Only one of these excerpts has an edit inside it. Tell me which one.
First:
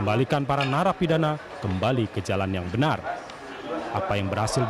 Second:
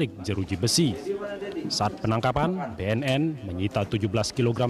second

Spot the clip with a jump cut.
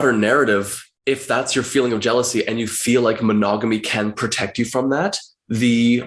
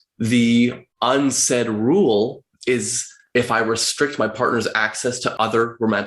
second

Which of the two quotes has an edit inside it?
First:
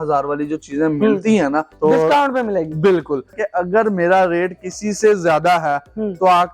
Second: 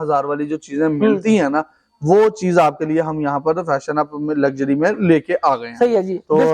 first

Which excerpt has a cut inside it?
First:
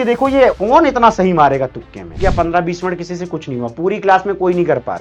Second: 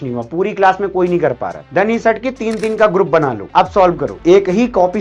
first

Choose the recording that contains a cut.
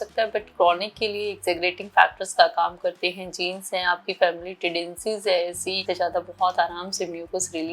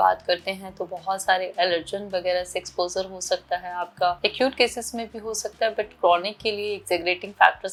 first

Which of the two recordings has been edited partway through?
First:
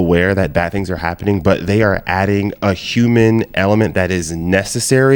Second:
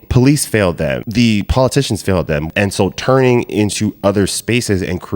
second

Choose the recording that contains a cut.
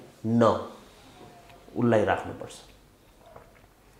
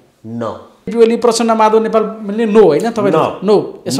second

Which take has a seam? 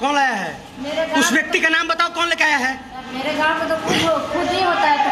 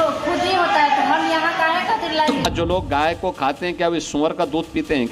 second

